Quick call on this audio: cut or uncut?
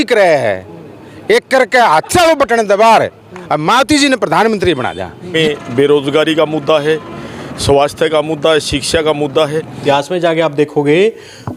cut